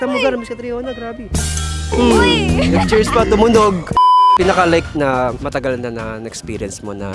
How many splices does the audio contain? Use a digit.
1